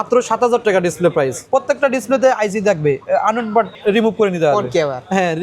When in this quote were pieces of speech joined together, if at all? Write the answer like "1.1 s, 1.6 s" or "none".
1.4 s, 3.7 s